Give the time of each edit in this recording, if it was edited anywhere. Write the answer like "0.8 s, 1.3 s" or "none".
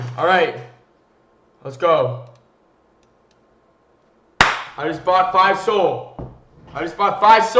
none